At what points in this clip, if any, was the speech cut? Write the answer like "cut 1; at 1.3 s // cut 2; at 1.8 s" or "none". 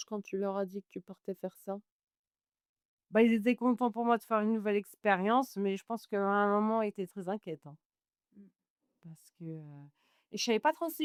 none